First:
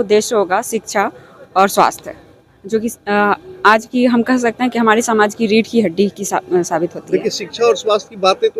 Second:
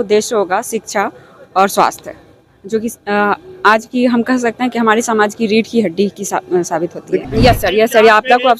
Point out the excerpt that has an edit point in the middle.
second; 1 cut; at 7.2 s

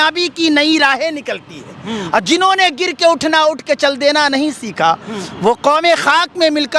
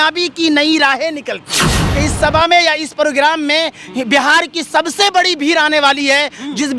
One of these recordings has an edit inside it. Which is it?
second; 1 cut; at 1.8 s

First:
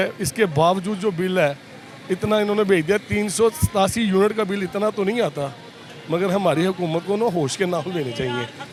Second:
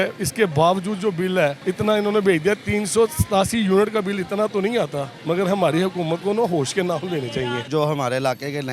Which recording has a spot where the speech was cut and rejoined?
second; 3 cuts; at 1.6 s, 5.1 s, 7.7 s

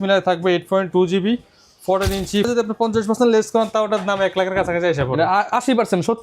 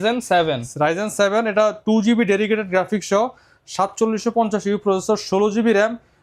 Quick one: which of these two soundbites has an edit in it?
first; 1 cut; at 2.5 s

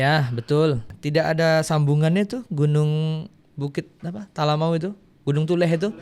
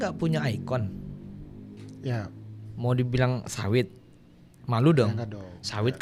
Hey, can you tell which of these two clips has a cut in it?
first; 1 cut; at 0.9 s

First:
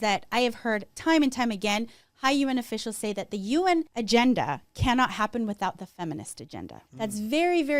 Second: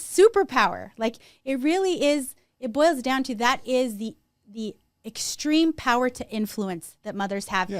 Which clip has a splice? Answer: first; 3 cuts; at 0.9 s, 4.0 s, 6.8 s

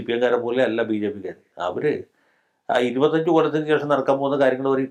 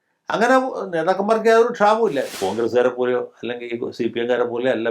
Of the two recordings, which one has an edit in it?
second; 1 cut; at 2.3 s

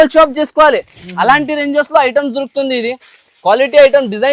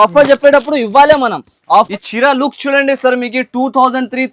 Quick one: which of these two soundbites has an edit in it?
second; 1 cut; at 1.9 s

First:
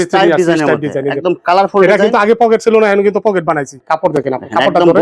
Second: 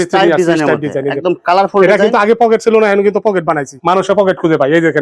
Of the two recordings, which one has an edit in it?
first; 1 cut; at 3.7 s

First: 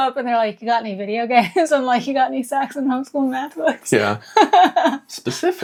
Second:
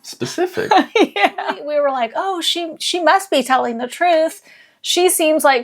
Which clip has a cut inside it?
second; 1 cut; at 1.6 s

